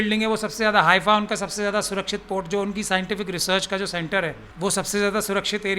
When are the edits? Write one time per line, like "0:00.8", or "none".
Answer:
0:04.4